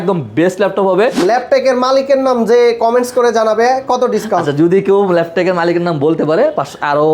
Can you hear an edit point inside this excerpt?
yes; 1 cut; at 1.2 s

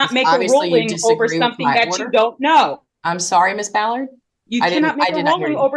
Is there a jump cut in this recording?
no; 0 cuts

